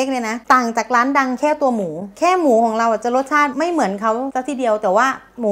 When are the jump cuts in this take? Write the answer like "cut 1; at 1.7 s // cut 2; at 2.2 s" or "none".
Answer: none